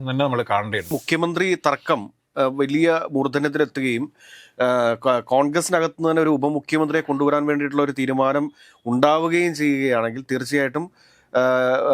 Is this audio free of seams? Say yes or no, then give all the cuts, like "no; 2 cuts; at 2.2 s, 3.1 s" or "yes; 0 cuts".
no; 1 cut; at 0.9 s